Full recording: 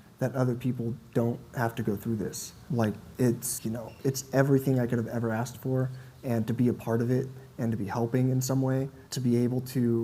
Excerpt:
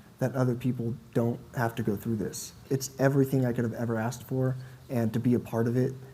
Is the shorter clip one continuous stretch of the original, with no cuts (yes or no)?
no